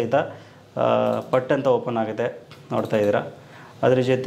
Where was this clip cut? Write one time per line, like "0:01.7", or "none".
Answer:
none